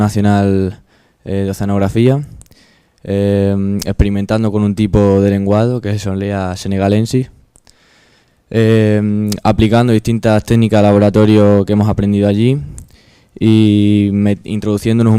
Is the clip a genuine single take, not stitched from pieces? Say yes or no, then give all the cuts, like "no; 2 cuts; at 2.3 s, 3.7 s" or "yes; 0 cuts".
no; 1 cut; at 4.9 s